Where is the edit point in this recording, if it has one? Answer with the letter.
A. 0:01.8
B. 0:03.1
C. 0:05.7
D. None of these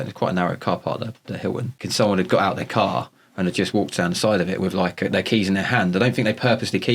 A